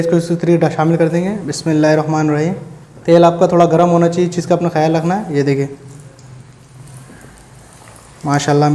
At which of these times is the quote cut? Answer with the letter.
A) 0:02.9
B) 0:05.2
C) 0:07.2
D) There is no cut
D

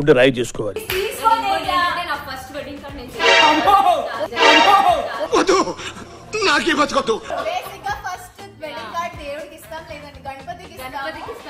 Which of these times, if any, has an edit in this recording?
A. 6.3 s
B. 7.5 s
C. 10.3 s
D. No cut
D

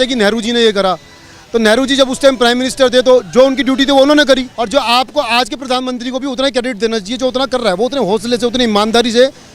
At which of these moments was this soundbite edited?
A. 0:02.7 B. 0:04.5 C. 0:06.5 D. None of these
B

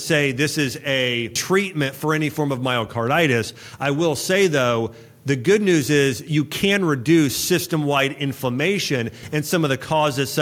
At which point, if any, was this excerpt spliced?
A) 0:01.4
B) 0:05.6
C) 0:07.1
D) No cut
A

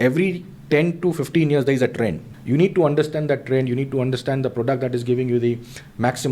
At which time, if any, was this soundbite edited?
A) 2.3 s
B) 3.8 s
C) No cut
A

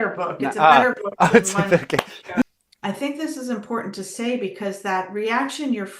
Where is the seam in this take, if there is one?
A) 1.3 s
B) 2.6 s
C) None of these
B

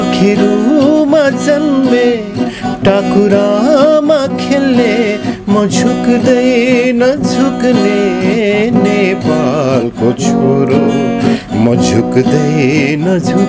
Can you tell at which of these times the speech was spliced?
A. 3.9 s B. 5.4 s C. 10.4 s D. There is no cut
D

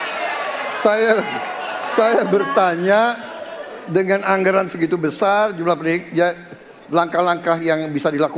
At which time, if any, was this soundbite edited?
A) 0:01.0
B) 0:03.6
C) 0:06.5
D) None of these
D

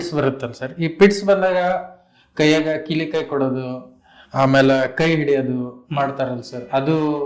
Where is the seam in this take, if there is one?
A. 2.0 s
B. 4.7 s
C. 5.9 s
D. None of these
D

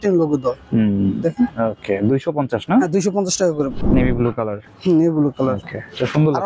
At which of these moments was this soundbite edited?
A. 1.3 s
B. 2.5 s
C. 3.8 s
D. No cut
C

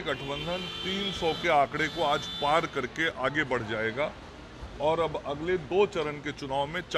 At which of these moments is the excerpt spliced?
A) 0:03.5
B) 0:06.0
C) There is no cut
B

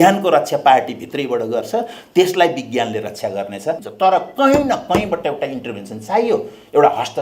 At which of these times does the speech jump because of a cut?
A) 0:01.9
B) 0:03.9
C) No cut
B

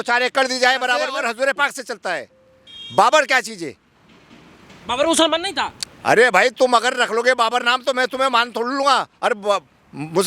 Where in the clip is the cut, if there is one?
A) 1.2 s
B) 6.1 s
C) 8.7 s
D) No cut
A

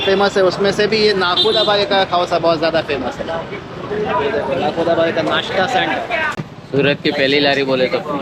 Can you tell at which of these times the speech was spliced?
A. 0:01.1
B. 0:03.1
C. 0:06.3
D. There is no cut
C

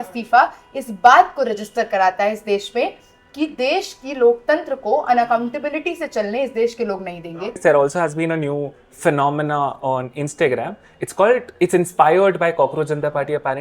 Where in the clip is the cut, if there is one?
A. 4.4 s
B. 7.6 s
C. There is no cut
B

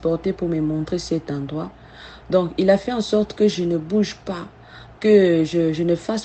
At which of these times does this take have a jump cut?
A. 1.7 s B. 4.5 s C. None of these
C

